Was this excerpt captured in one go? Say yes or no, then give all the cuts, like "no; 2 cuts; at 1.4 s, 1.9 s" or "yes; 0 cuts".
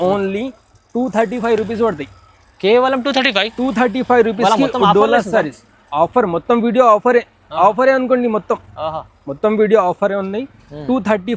yes; 0 cuts